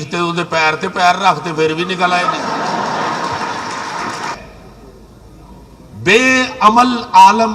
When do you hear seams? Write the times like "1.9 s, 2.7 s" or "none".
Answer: 4.3 s